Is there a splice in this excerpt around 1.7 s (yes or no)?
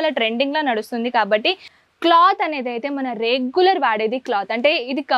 yes